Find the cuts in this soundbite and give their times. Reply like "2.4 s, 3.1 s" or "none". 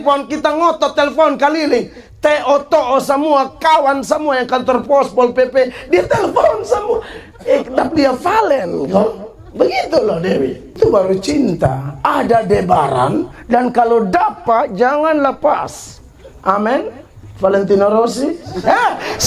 10.7 s